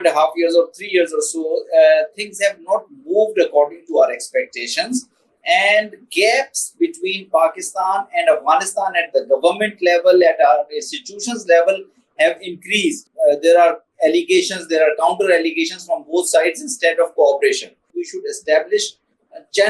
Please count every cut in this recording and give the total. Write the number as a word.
two